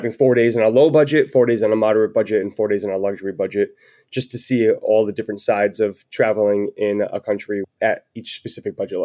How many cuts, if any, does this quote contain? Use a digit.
1